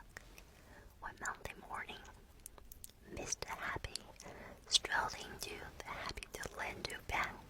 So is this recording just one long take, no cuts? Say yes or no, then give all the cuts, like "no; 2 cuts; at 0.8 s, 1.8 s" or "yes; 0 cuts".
yes; 0 cuts